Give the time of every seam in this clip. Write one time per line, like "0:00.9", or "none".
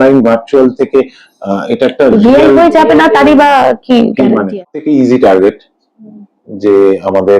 0:04.5

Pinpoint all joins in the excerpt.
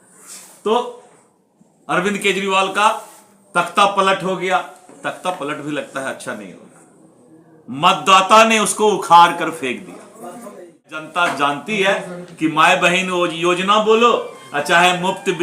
0:11.1

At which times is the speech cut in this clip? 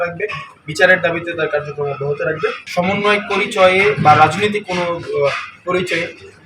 0:02.6

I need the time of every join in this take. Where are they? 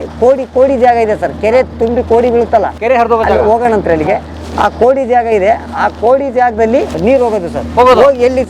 none

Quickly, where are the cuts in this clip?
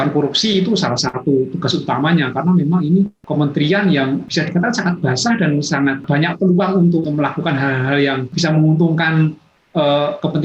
0:03.2
0:04.2
0:06.0
0:07.1
0:08.3

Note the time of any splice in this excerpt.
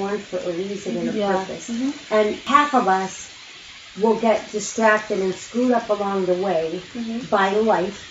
0:02.4

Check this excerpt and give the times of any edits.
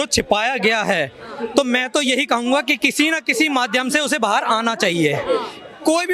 none

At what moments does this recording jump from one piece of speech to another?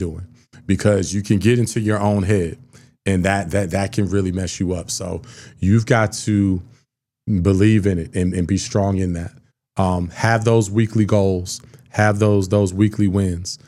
none

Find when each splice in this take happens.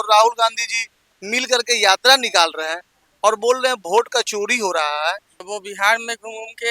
0:05.3

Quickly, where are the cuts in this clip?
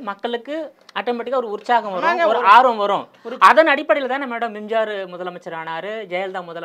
none

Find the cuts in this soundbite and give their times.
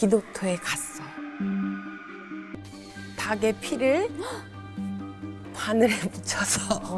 0:02.5

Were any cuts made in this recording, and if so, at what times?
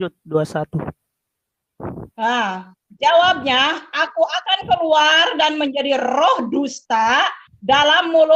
none

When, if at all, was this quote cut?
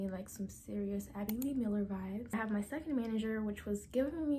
0:02.3

